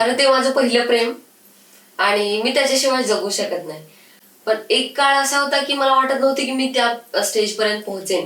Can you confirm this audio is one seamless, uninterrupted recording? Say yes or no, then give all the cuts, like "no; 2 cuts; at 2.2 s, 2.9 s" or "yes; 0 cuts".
yes; 0 cuts